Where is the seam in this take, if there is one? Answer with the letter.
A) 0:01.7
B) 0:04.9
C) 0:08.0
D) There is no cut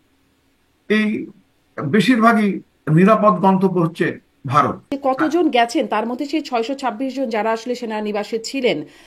B